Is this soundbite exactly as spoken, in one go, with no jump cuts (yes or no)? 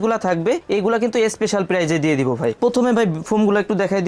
no